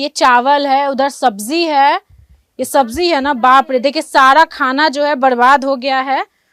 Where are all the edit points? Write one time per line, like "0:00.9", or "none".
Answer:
none

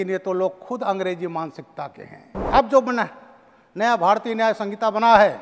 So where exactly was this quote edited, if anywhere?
0:02.5

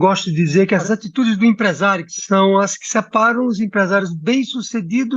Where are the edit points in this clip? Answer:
0:00.8
0:02.1

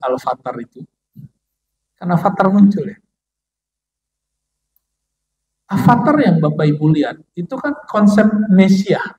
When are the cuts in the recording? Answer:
none

